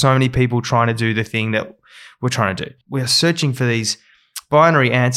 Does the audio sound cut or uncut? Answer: cut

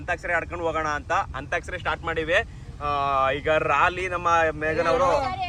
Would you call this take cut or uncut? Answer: uncut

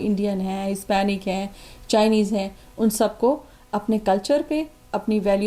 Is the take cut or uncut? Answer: uncut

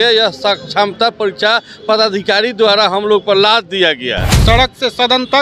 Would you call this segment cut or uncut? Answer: cut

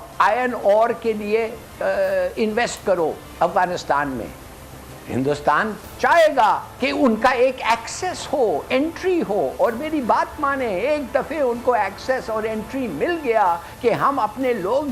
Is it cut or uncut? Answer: uncut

